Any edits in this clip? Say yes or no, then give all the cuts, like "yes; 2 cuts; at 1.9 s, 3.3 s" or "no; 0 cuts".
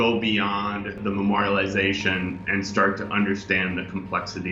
yes; 1 cut; at 0.9 s